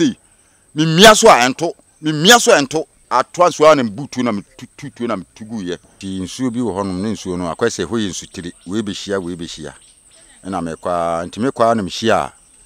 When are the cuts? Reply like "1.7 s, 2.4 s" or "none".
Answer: 3.0 s, 5.9 s